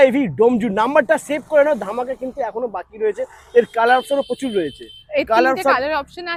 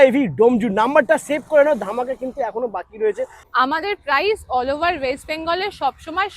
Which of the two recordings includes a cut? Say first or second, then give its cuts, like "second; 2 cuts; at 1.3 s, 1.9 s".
second; 1 cut; at 3.4 s